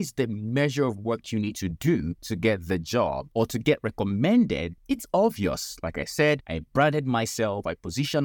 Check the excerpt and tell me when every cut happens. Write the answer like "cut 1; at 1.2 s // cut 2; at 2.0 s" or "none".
cut 1; at 2.2 s // cut 2; at 3.2 s // cut 3; at 4.7 s // cut 4; at 6.5 s